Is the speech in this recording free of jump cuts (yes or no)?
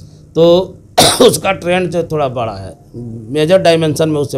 yes